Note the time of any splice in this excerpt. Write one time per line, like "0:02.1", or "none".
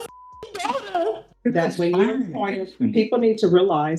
0:01.5